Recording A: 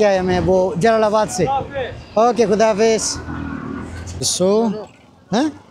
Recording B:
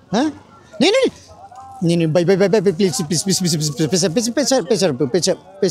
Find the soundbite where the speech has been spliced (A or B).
A